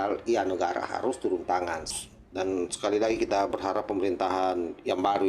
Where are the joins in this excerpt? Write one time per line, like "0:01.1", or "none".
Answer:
0:01.9